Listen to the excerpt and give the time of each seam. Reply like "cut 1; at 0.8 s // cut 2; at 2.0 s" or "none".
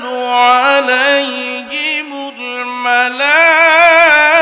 none